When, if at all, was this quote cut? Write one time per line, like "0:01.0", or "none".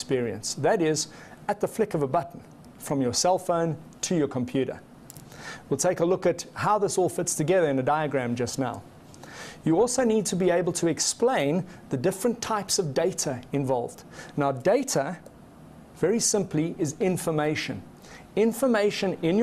0:16.5

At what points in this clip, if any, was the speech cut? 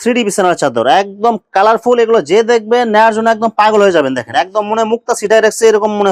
none

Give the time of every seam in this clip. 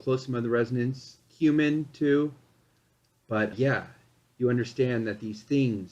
0:03.5

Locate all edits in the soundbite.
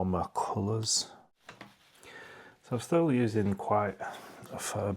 0:01.3

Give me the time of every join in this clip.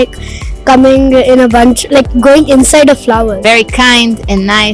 0:03.4

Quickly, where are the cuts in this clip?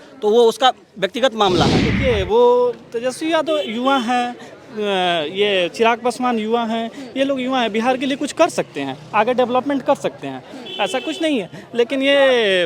0:01.9

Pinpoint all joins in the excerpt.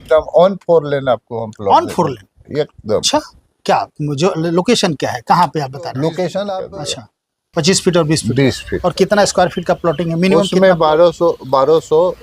0:06.6

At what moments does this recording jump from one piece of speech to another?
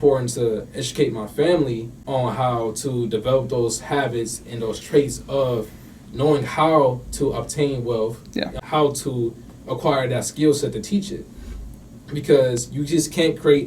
0:01.9
0:08.6

